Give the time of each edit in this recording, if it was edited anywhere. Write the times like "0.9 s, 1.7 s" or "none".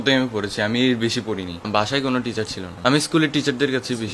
1.7 s, 2.6 s